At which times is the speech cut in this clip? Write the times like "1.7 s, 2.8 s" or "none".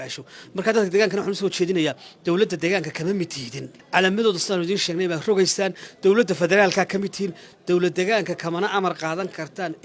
3.8 s, 7.4 s